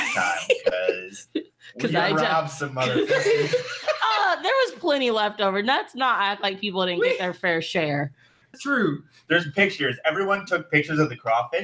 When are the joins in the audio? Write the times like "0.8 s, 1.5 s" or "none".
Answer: 8.5 s